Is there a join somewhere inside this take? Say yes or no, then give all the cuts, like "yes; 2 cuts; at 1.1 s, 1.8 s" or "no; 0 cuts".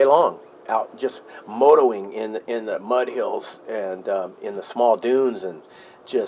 no; 0 cuts